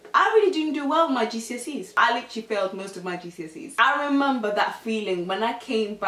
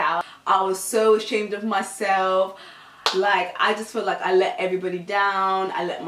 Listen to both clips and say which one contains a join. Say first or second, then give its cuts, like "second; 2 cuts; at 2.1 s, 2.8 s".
first; 2 cuts; at 1.9 s, 3.7 s